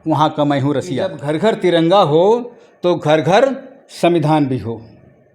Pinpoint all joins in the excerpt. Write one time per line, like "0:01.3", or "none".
0:01.2